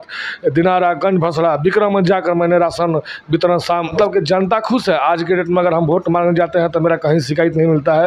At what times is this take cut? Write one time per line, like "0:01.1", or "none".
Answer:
0:03.9